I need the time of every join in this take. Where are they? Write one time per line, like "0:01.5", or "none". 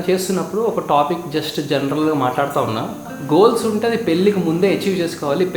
0:03.1